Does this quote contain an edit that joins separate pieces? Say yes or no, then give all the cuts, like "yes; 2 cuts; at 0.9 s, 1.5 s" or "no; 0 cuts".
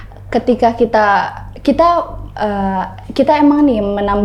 no; 0 cuts